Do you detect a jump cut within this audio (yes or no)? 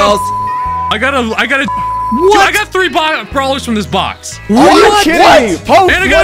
no